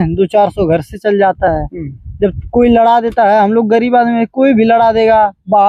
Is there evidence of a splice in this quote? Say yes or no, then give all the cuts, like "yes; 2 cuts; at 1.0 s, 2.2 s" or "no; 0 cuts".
no; 0 cuts